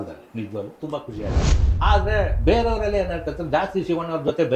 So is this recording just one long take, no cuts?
no; 1 cut; at 1.6 s

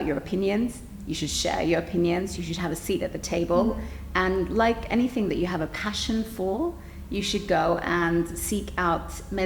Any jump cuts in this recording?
no; 0 cuts

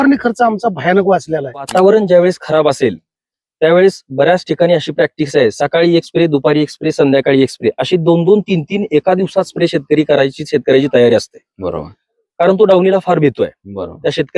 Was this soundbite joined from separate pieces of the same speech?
yes; 1 cut; at 1.7 s

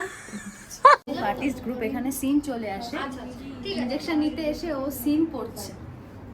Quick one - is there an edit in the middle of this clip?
yes; 1 cut; at 1.0 s

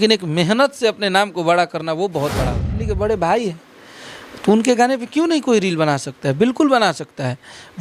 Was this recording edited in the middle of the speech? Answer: yes; 1 cut; at 2.8 s

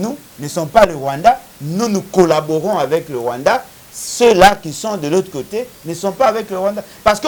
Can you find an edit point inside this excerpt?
no; 0 cuts

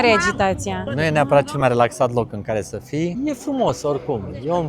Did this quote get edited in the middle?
yes; 2 cuts; at 0.9 s, 3.1 s

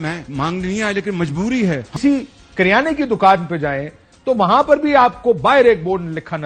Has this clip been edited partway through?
yes; 1 cut; at 2.0 s

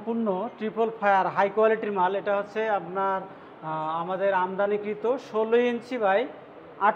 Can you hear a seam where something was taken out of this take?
no; 0 cuts

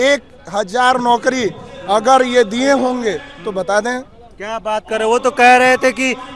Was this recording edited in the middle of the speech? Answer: no; 0 cuts

